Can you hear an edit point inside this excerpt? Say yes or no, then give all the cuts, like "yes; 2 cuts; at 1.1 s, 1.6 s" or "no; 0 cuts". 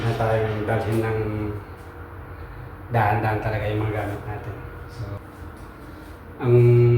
yes; 1 cut; at 5.2 s